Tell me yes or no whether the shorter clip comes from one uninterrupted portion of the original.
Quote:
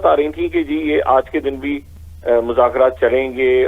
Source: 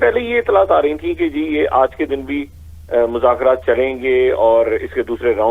yes